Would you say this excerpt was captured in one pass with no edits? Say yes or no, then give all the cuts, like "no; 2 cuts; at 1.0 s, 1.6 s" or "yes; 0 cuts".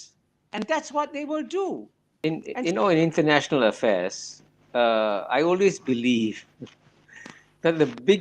no; 1 cut; at 2.2 s